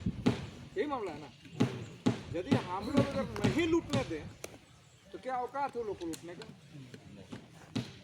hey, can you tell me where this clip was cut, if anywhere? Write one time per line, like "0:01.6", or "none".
none